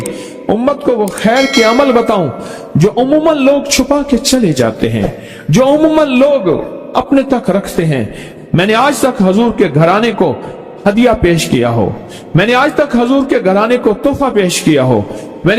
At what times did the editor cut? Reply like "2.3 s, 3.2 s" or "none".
8.2 s